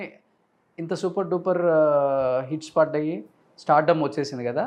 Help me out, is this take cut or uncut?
uncut